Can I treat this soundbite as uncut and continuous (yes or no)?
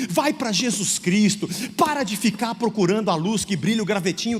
yes